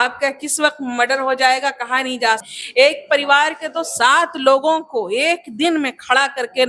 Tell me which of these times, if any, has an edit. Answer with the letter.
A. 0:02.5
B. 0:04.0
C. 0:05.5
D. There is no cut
A